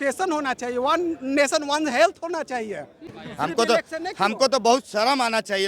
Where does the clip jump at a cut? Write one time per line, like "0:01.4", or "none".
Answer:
none